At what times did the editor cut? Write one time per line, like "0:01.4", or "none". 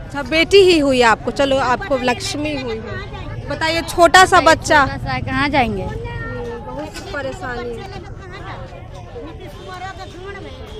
none